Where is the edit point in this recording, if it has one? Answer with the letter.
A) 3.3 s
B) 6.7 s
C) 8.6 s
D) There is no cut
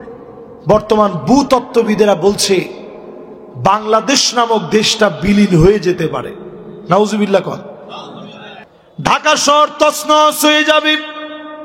C